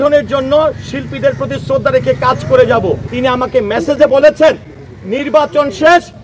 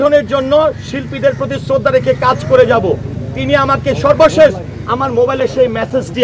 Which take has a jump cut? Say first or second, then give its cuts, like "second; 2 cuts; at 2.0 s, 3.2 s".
first; 1 cut; at 3.1 s